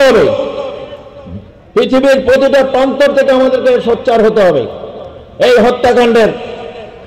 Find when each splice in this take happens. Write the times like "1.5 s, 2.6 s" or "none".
none